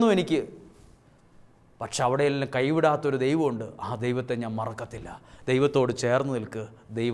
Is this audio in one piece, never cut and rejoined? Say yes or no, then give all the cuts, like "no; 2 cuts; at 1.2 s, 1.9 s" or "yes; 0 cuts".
yes; 0 cuts